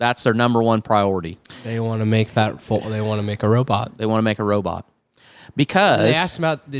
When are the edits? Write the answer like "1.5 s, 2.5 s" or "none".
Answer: none